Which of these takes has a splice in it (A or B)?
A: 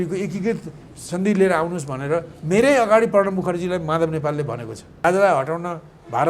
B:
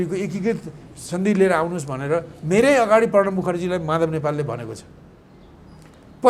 A